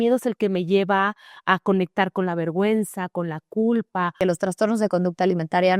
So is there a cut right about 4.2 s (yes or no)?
yes